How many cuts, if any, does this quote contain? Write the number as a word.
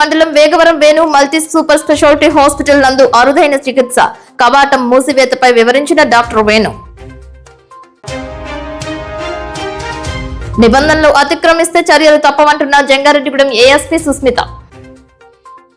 zero